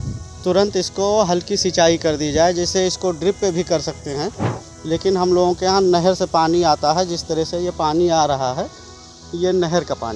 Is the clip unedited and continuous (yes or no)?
yes